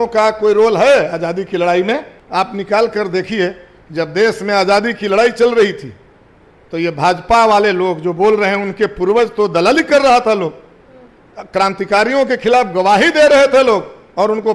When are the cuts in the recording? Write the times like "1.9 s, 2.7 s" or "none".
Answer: 2.2 s